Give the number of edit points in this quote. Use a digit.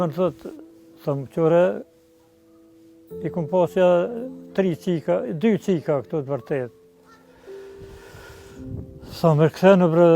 2